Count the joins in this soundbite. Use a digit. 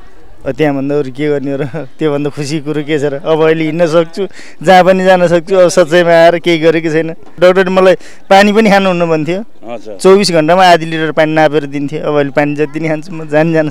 1